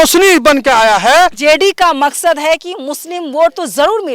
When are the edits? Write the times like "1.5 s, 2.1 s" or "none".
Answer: 1.4 s